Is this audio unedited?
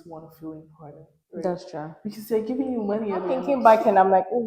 no; 1 cut; at 3.4 s

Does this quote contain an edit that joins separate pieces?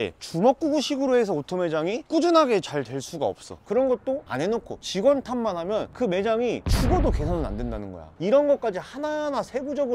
yes; 2 cuts; at 3.5 s, 8.1 s

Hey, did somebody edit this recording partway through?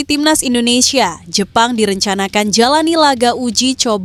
no; 0 cuts

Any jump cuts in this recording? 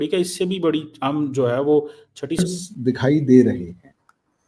yes; 1 cut; at 2.4 s

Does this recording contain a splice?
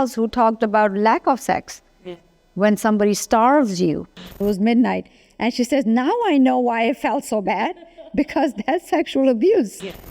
yes; 1 cut; at 4.4 s

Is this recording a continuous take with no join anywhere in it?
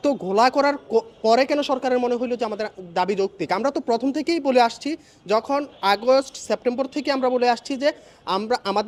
yes; 0 cuts

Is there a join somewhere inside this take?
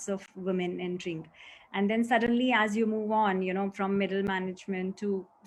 no; 0 cuts

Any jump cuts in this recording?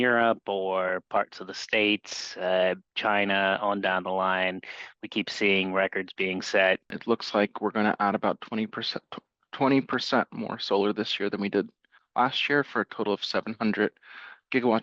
yes; 1 cut; at 6.9 s

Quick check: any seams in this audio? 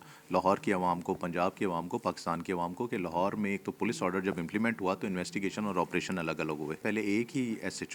yes; 1 cut; at 6.8 s

